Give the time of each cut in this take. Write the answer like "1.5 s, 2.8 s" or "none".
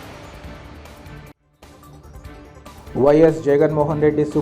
none